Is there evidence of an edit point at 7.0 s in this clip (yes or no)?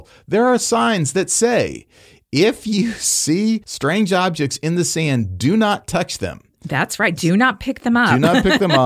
no